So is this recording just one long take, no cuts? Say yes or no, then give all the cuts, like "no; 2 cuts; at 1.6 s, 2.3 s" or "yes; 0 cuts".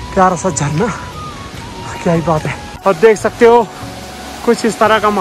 no; 1 cut; at 2.7 s